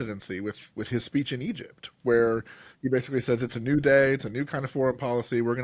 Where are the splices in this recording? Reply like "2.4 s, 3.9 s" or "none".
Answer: none